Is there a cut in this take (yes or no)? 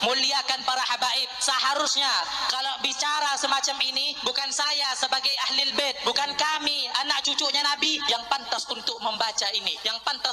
no